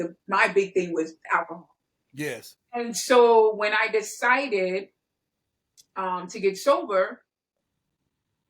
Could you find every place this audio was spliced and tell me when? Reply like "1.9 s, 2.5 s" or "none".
none